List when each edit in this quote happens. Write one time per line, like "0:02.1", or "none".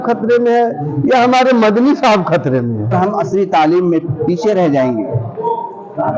0:02.9